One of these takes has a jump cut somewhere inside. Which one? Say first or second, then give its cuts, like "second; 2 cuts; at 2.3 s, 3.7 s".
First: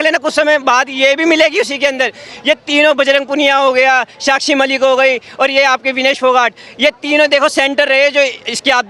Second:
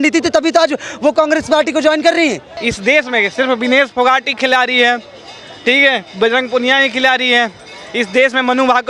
second; 1 cut; at 2.5 s